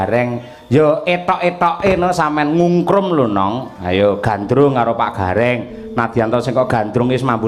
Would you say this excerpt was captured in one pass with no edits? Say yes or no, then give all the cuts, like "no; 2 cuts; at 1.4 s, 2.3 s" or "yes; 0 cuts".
yes; 0 cuts